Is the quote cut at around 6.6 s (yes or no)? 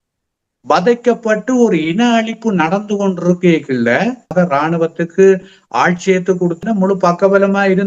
yes